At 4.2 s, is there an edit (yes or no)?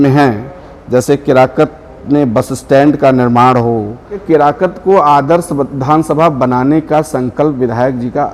yes